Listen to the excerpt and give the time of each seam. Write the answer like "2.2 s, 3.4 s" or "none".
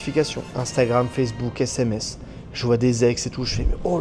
none